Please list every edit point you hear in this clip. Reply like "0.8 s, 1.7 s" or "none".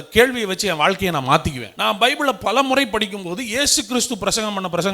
1.6 s

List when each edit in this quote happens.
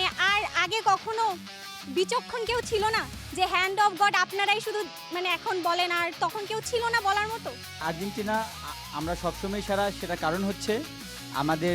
7.8 s

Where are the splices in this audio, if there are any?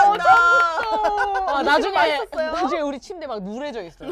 none

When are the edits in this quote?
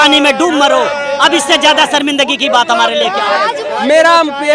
3.6 s

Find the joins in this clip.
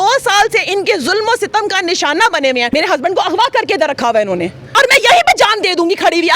2.7 s, 4.7 s

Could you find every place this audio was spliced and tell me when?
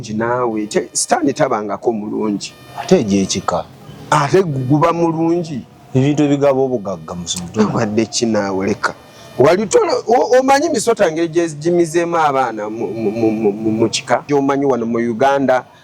14.3 s

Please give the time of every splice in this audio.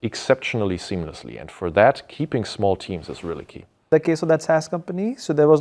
3.9 s

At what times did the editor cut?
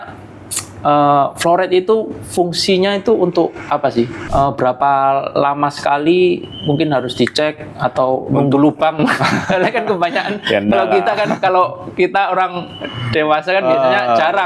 4.2 s

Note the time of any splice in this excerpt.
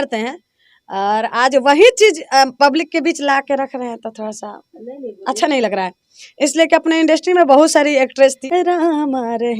8.4 s

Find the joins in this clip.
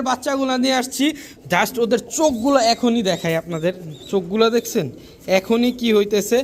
none

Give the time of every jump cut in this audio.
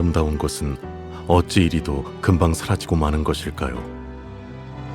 3.8 s

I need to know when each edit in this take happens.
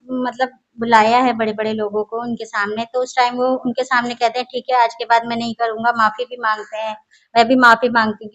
none

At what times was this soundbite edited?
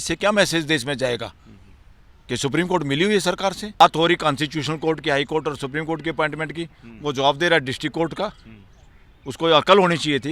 3.8 s

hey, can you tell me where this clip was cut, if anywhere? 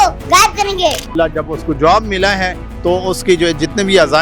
1.1 s

